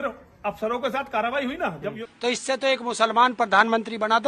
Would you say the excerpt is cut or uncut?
cut